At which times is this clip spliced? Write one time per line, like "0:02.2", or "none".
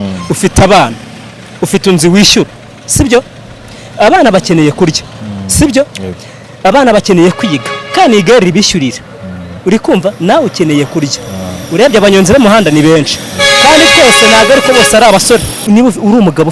0:15.6